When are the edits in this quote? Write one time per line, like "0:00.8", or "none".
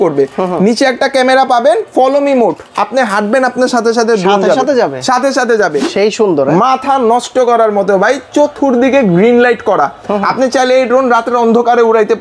0:05.8